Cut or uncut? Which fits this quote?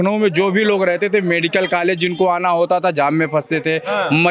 uncut